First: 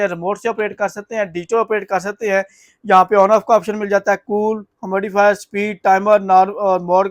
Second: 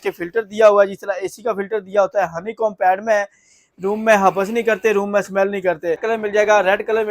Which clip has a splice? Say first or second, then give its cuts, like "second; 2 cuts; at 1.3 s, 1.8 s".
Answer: second; 1 cut; at 6.0 s